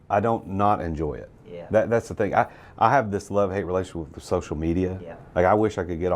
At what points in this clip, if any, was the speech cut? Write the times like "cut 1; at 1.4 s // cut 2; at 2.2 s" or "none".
none